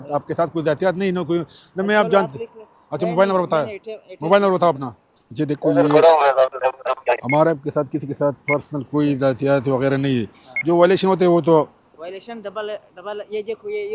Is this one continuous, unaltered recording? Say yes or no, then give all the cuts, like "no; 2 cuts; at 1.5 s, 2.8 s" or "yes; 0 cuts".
yes; 0 cuts